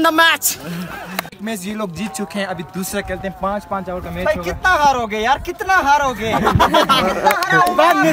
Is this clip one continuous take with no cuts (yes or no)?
no